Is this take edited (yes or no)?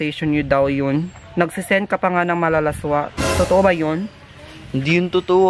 yes